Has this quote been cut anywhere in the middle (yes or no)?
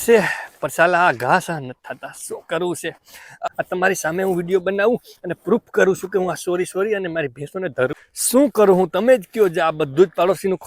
yes